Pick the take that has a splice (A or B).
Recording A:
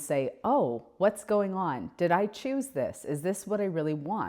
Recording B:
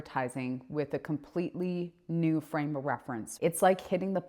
B